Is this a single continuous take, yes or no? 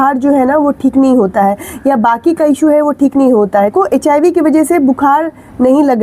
no